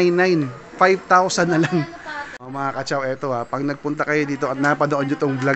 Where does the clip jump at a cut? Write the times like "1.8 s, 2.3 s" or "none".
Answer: 2.6 s